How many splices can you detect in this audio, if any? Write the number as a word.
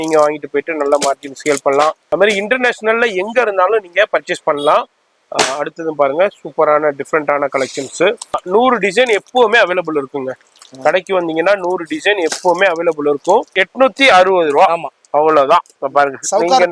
three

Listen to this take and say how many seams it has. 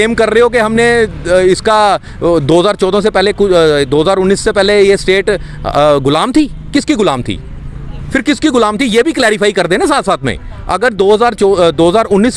zero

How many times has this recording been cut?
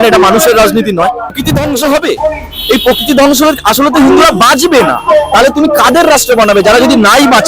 one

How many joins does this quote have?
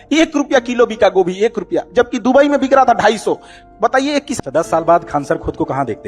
one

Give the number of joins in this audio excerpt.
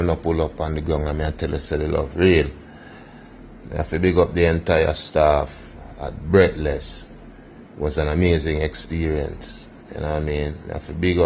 zero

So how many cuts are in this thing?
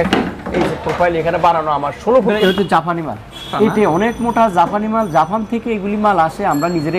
two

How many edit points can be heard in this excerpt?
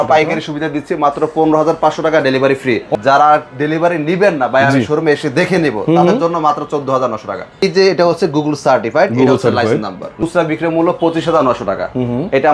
three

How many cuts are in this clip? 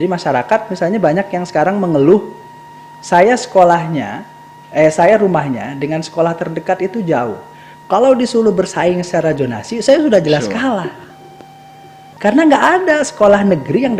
zero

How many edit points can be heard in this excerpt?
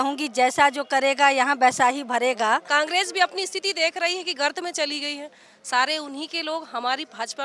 one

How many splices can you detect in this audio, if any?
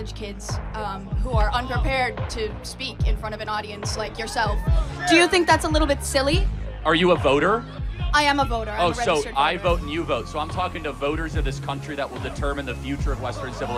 zero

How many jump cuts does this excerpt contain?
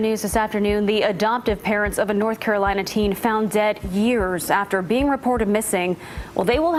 zero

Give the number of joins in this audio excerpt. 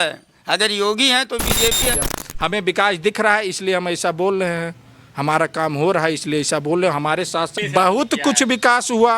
two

